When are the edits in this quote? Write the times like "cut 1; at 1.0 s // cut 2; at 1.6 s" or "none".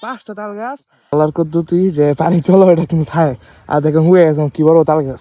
cut 1; at 1.1 s